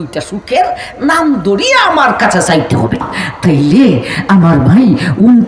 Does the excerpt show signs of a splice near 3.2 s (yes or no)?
yes